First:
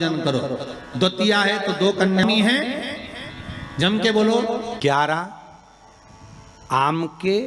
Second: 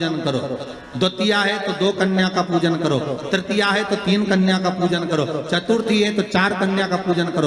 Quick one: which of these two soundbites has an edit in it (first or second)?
first